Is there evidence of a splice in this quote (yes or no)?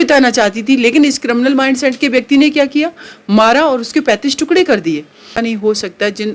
yes